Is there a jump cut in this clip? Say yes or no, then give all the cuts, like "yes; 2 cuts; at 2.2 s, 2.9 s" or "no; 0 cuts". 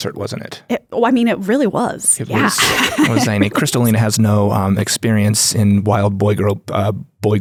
no; 0 cuts